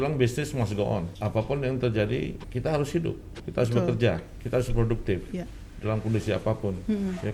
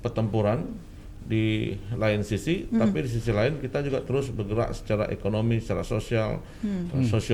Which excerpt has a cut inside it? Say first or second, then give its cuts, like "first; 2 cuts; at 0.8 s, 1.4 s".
first; 4 cuts; at 1.1 s, 2.5 s, 3.4 s, 4.4 s